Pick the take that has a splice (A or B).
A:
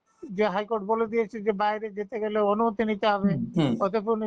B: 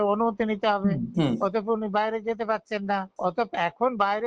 B